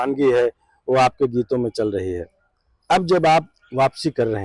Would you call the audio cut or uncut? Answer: uncut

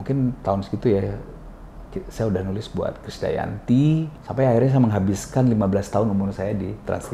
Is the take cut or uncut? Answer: cut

